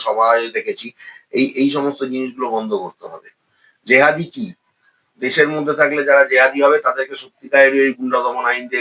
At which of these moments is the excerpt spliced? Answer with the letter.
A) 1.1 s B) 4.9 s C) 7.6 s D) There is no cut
D